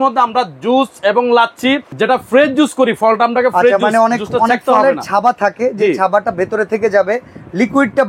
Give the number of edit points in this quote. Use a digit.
1